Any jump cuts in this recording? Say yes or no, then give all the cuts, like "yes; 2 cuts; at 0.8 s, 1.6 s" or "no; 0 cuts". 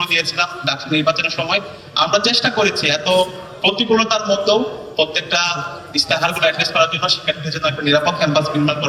no; 0 cuts